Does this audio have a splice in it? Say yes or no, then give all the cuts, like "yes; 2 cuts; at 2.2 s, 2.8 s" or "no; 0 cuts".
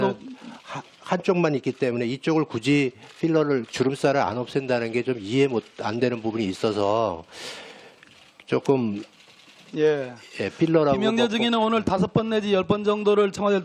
no; 0 cuts